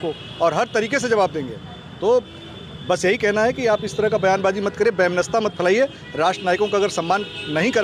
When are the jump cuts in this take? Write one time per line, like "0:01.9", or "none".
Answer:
none